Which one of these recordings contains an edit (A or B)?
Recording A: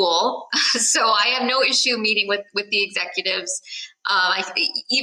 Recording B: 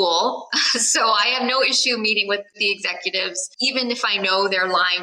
B